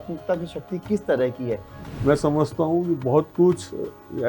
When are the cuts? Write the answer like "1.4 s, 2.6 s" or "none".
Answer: 1.8 s